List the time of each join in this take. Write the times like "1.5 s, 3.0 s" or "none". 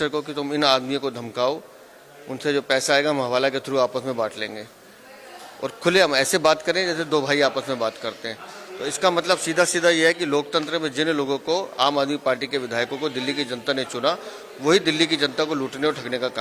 none